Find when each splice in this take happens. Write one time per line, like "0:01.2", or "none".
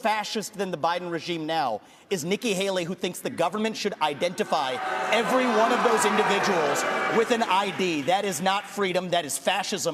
none